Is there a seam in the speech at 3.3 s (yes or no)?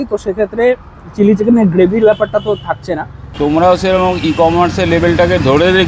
yes